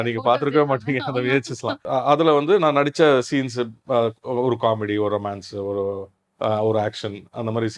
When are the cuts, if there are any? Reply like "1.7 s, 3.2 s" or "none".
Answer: 1.8 s